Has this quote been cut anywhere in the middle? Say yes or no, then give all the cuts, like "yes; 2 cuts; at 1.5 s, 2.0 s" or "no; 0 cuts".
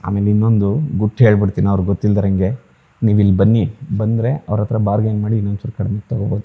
no; 0 cuts